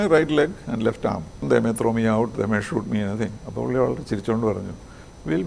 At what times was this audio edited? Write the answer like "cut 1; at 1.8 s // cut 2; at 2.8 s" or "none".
cut 1; at 1.4 s